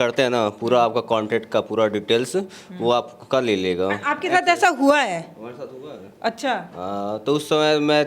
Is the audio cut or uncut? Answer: uncut